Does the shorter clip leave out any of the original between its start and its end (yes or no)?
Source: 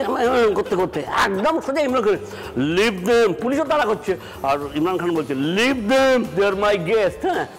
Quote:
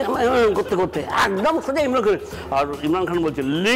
yes